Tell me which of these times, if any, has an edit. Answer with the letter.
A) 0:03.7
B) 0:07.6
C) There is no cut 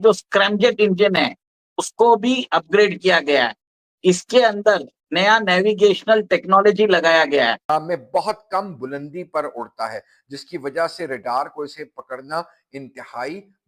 B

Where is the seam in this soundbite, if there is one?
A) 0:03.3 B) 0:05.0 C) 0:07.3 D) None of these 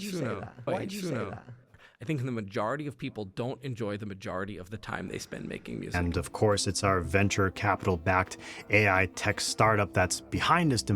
C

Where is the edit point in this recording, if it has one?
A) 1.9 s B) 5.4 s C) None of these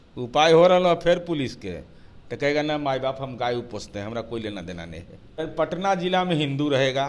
B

